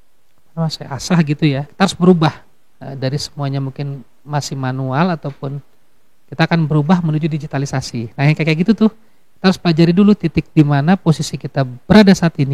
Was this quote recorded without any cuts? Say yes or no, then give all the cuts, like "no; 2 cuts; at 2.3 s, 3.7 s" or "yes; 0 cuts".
no; 1 cut; at 1.6 s